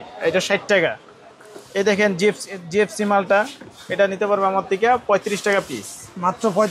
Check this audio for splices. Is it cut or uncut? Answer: uncut